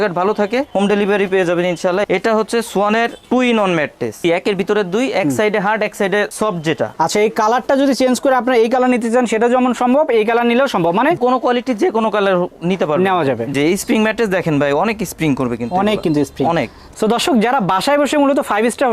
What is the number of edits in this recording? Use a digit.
5